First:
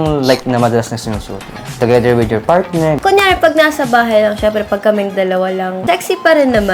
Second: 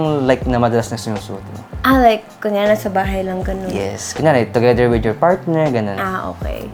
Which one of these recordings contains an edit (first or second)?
first